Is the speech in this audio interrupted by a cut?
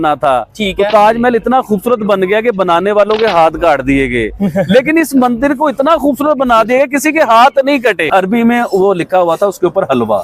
yes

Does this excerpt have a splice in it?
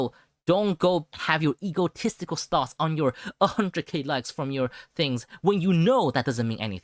yes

